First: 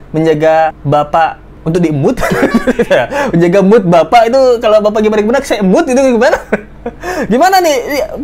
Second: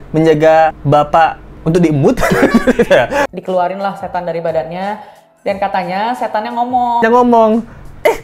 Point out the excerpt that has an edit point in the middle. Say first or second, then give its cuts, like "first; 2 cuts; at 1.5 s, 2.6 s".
second; 2 cuts; at 3.3 s, 7.0 s